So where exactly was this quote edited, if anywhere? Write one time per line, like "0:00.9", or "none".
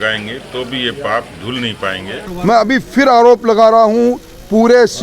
0:02.3